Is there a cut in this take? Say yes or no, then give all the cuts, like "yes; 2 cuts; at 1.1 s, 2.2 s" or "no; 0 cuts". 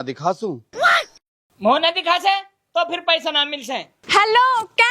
yes; 1 cut; at 3.9 s